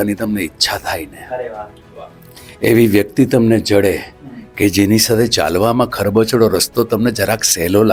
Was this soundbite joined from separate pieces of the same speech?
no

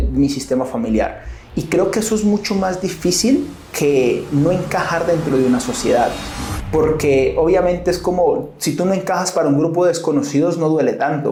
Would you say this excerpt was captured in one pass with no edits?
yes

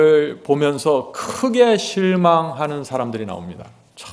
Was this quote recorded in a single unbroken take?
yes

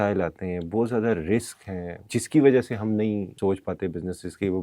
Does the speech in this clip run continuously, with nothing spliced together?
no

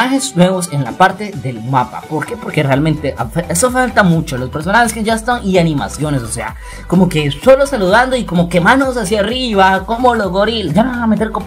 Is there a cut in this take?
no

